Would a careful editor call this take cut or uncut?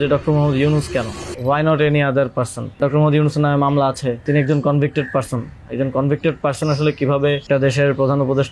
cut